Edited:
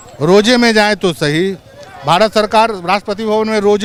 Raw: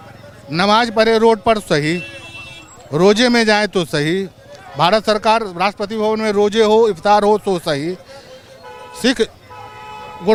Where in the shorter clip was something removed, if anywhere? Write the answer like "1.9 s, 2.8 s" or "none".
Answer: none